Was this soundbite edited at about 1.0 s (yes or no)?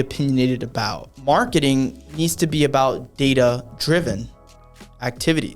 yes